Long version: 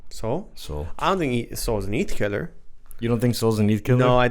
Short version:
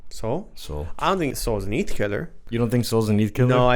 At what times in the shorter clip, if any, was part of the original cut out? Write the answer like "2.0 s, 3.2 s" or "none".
1.3 s, 2.4 s